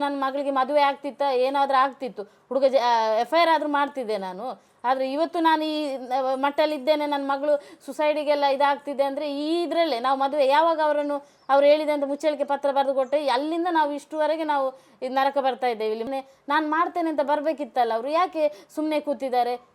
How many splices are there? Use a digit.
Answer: 1